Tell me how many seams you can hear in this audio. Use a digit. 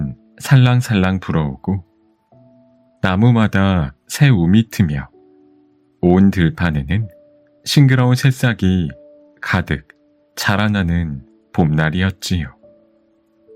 1